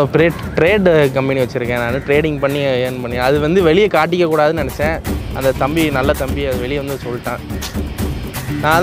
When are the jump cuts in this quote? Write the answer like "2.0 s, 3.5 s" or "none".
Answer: none